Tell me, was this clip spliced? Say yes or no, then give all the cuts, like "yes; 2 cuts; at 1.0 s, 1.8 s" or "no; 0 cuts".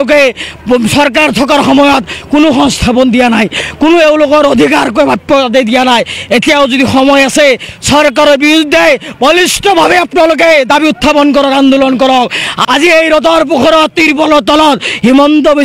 yes; 1 cut; at 12.5 s